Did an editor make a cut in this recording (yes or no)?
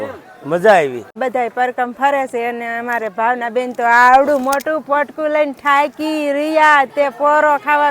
yes